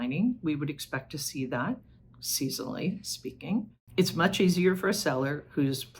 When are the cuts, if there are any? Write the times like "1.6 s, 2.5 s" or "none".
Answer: 3.8 s